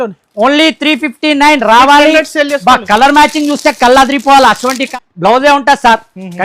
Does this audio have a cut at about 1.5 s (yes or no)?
no